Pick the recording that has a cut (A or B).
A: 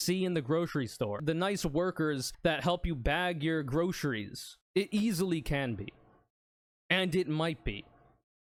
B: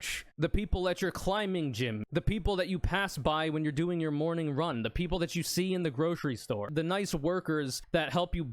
B